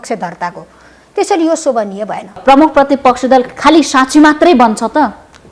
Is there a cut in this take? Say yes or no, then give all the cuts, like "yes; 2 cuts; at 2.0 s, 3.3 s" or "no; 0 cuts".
yes; 1 cut; at 2.3 s